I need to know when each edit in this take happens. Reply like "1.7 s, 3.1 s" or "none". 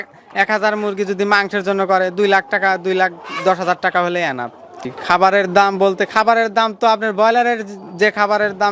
4.9 s